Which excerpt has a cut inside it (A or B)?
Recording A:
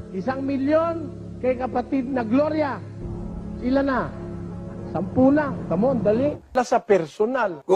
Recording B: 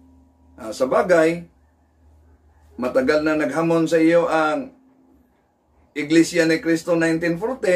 A